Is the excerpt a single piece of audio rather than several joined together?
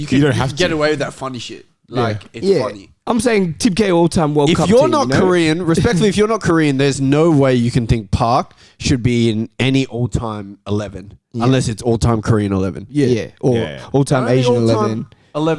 yes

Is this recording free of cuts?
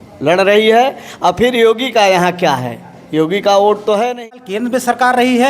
no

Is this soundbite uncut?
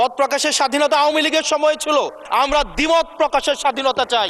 no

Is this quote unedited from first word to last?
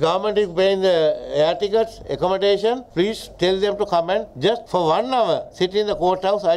yes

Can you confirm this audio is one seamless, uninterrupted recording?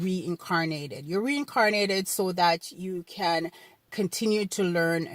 no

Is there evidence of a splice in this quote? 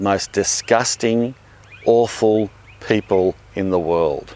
no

